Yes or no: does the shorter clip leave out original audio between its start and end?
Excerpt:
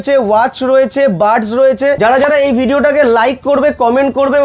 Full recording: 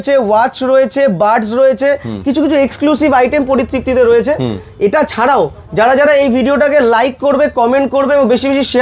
yes